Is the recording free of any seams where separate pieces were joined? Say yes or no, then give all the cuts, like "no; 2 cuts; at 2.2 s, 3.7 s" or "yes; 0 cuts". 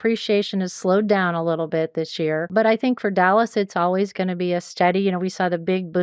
no; 1 cut; at 2.5 s